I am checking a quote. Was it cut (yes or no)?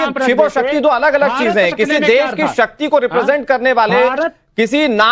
no